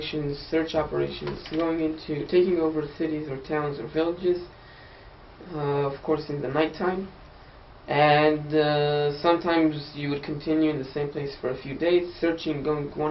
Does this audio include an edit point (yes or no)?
no